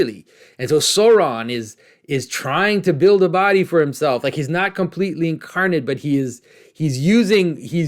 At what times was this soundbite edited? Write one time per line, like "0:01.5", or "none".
none